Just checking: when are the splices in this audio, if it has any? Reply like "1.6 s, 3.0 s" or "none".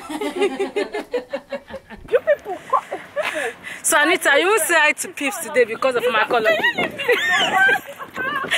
2.1 s